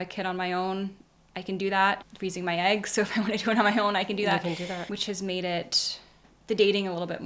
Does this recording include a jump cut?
no; 0 cuts

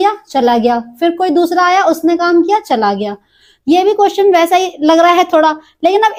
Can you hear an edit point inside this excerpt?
no; 0 cuts

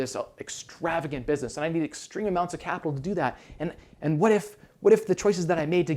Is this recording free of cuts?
yes; 0 cuts

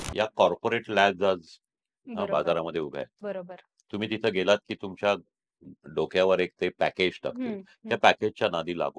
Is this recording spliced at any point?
no; 0 cuts

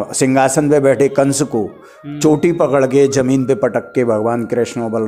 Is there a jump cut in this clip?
no; 0 cuts

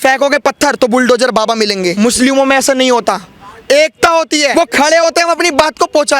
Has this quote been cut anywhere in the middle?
yes; 2 cuts; at 1.9 s, 4.5 s

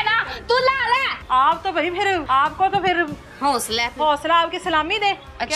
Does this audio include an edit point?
yes; 2 cuts; at 1.1 s, 2.2 s

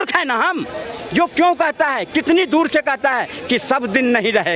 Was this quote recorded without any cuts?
yes; 0 cuts

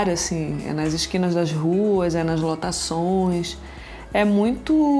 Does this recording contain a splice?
no; 0 cuts

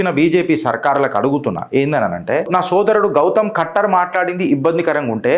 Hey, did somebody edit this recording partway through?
yes; 1 cut; at 2.5 s

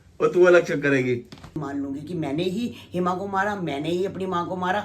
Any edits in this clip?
yes; 1 cut; at 1.6 s

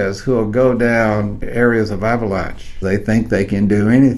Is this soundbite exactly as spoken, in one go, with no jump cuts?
no; 2 cuts; at 1.4 s, 2.7 s

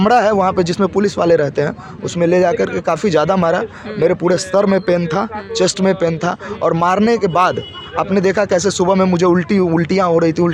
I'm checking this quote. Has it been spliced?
no; 0 cuts

